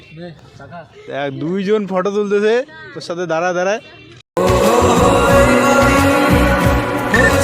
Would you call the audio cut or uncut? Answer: cut